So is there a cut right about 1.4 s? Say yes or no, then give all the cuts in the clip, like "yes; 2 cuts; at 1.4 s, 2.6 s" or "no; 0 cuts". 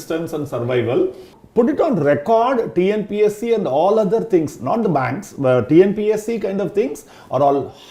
yes; 1 cut; at 1.4 s